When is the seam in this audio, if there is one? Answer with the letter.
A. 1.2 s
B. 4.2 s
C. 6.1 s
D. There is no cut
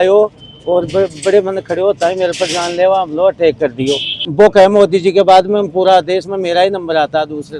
B